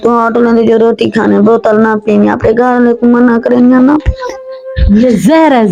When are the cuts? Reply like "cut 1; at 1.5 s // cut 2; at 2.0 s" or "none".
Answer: none